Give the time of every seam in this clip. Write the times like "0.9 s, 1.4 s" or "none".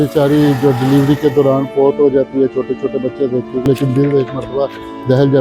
3.7 s